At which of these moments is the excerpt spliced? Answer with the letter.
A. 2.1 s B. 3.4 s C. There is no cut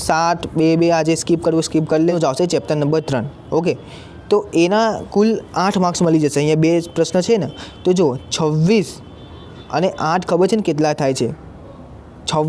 A